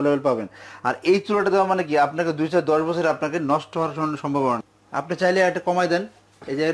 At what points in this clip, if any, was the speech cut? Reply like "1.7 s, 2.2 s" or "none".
4.8 s